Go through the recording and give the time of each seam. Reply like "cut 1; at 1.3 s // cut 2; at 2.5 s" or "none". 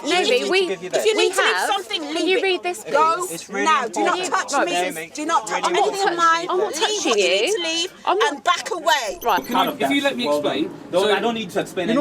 cut 1; at 9.4 s

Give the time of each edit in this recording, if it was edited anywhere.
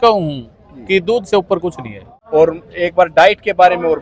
cut 1; at 2.1 s

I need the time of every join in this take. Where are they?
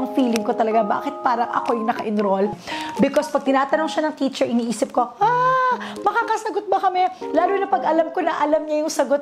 cut 1; at 2.6 s

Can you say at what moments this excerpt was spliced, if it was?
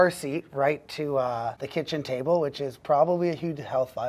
cut 1; at 1.6 s

